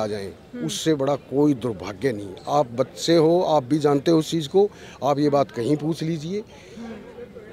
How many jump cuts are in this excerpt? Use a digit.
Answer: 0